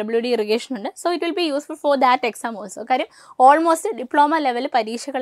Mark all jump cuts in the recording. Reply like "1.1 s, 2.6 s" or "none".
none